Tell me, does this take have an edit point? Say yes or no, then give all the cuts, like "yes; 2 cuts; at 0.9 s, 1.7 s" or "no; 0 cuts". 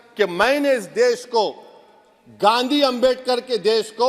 no; 0 cuts